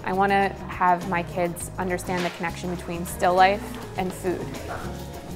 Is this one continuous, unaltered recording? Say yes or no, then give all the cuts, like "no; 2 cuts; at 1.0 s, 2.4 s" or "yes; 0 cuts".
yes; 0 cuts